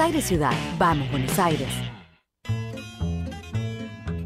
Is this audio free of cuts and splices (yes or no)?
no